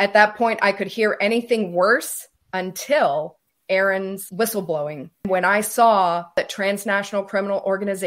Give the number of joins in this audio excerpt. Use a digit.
4